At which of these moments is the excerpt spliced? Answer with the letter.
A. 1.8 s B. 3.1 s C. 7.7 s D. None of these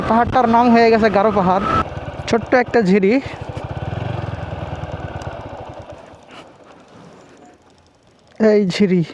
A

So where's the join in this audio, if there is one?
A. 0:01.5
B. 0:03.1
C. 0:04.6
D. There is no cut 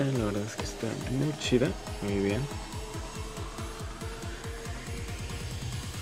C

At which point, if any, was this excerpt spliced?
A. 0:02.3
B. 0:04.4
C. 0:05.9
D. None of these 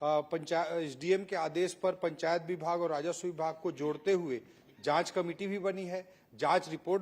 D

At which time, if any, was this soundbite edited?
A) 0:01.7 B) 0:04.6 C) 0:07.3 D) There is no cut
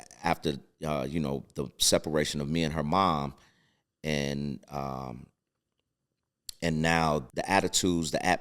C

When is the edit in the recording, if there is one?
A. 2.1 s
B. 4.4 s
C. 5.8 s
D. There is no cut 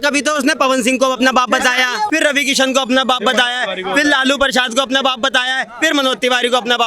A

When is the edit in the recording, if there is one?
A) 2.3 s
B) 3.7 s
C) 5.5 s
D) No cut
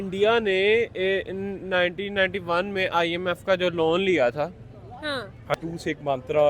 C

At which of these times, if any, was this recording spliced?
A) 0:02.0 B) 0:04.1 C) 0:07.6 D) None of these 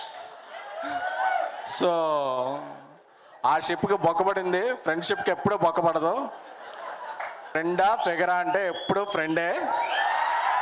C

